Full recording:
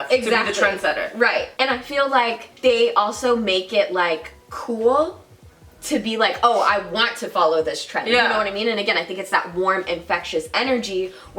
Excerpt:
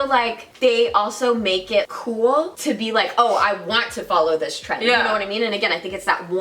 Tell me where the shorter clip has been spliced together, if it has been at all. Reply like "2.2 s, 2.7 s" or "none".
1.9 s, 2.5 s